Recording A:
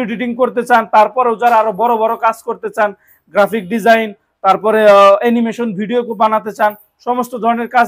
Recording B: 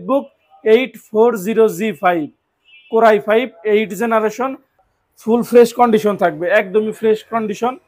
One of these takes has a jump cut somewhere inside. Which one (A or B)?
B